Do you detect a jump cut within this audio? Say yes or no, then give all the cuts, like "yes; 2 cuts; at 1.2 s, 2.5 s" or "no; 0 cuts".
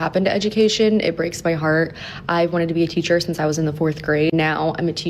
no; 0 cuts